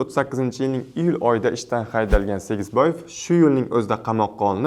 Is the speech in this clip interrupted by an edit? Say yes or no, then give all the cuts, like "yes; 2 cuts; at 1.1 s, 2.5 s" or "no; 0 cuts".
no; 0 cuts